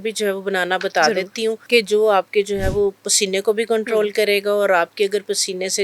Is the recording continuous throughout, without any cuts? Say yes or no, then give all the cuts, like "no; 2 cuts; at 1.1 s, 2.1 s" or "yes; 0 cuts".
no; 1 cut; at 1.6 s